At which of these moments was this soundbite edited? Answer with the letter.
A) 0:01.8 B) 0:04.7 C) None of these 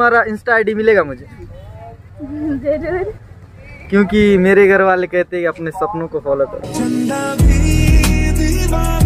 C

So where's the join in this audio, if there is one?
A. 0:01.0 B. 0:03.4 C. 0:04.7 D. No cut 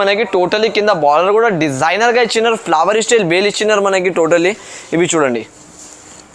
D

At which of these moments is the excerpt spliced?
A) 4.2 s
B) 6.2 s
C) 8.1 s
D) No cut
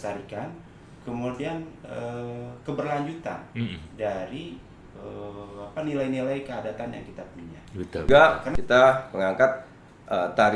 C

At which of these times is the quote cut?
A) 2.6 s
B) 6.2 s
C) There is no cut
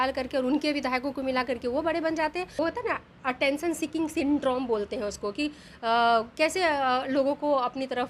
A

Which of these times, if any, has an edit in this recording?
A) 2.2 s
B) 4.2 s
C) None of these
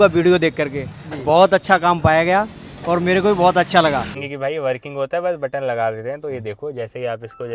B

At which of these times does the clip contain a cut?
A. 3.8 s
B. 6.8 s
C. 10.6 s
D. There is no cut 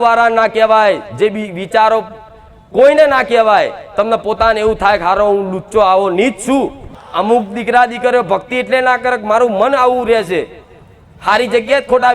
B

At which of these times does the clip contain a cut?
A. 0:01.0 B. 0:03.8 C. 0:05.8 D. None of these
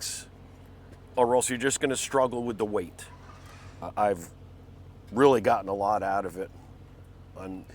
B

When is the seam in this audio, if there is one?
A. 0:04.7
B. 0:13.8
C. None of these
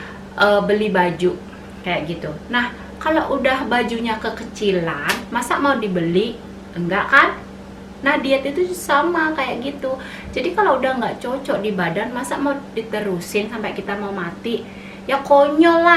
C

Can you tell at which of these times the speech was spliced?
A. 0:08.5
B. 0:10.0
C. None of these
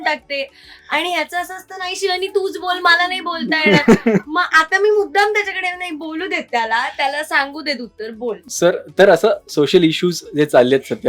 C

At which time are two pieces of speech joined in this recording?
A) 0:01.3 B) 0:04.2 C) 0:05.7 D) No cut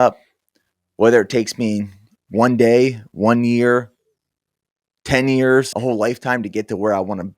C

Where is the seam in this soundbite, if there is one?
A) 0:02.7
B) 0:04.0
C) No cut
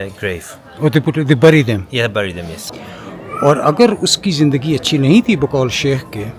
A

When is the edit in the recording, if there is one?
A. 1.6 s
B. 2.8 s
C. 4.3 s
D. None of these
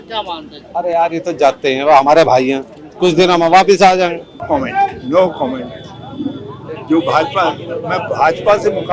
C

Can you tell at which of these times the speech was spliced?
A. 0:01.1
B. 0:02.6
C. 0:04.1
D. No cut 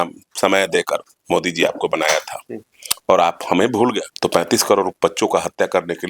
C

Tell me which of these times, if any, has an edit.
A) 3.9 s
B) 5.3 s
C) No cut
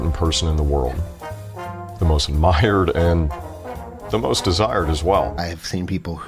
B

